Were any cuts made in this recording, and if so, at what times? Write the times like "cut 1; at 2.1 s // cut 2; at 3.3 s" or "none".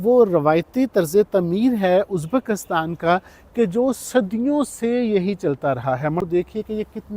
cut 1; at 6.3 s